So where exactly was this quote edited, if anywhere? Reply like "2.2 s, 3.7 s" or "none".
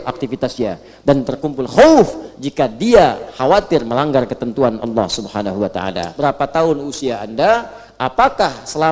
6.1 s

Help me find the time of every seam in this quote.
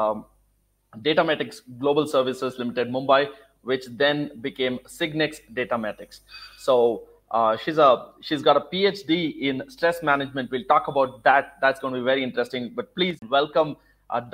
13.2 s

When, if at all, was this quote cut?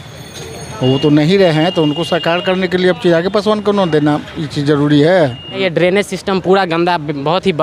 5.6 s

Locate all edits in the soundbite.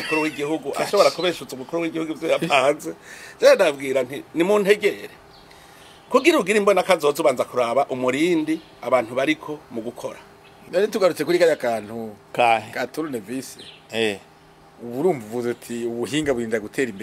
10.6 s

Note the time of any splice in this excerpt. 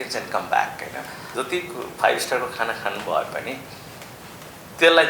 1.3 s

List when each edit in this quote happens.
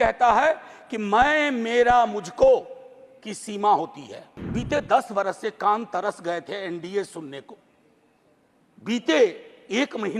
4.5 s

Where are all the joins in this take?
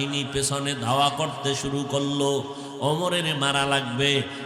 none

